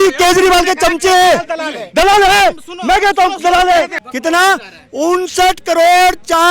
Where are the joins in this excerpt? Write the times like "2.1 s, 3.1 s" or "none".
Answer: 4.0 s